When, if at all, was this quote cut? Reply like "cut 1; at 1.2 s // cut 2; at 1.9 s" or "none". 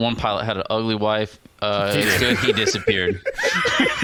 none